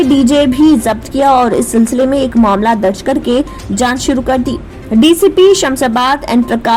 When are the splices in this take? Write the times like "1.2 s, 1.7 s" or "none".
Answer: none